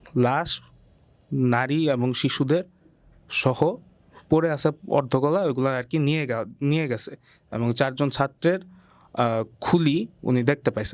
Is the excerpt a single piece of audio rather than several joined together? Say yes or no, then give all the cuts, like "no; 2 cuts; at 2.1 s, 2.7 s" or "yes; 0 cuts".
yes; 0 cuts